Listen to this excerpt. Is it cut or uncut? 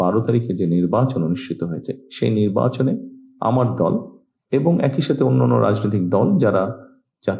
uncut